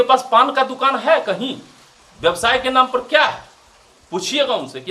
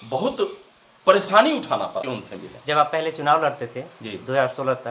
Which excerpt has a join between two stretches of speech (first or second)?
second